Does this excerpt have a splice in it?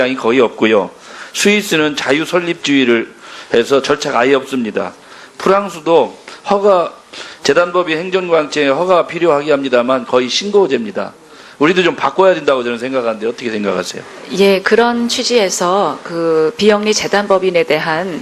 yes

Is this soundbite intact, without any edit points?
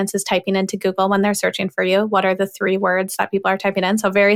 yes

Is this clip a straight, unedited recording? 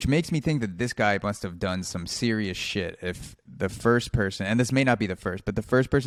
yes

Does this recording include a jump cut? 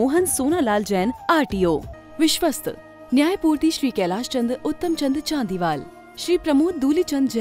yes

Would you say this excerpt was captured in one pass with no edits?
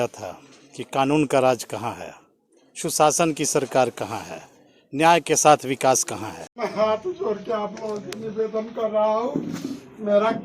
no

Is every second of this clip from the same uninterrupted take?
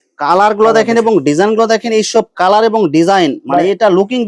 yes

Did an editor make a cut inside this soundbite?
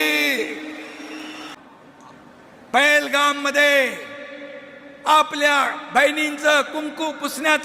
yes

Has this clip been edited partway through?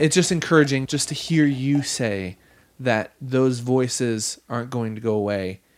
yes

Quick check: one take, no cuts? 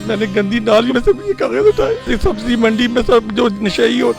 no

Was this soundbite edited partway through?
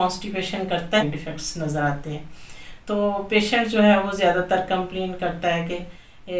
yes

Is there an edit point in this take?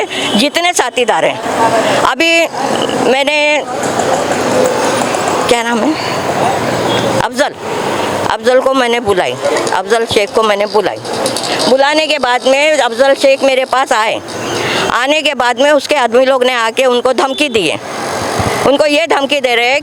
no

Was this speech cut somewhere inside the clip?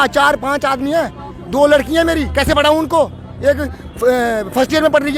no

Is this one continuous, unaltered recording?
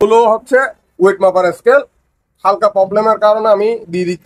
yes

